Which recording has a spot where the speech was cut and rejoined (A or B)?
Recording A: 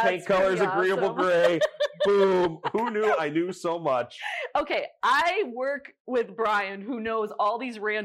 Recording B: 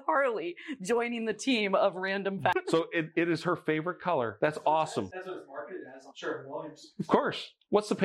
B